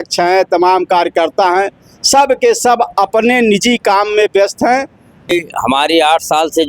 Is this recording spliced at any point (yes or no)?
yes